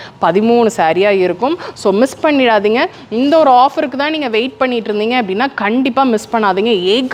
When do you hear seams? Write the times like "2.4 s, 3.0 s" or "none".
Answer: none

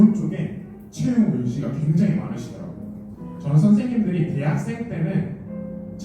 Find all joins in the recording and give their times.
3.2 s

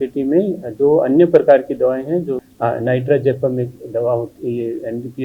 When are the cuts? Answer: 2.5 s

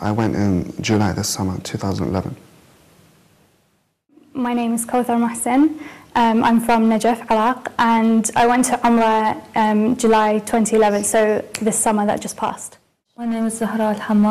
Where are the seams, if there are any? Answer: 6.0 s

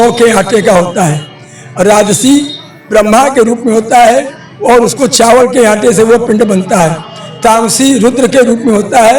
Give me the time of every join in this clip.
none

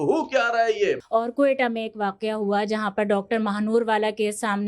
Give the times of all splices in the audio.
1.0 s

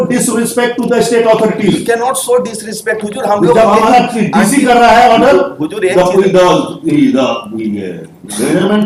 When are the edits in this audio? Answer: none

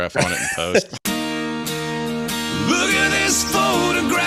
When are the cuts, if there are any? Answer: none

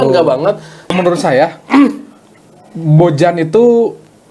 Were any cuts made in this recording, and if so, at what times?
0.9 s

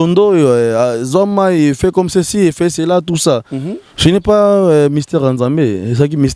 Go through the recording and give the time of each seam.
none

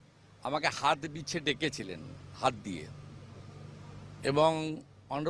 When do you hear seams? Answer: none

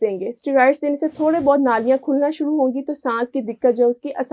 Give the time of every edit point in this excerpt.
none

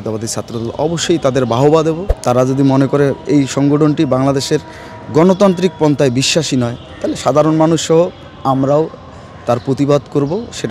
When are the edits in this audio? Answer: 2.1 s

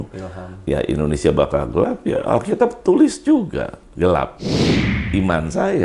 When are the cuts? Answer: 3.8 s, 4.9 s

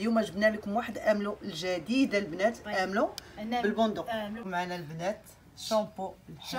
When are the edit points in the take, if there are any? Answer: 4.4 s

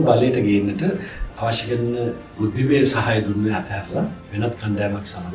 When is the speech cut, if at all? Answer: 1.2 s

